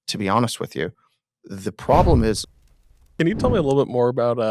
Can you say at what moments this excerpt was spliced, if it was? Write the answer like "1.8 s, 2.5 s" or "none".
2.5 s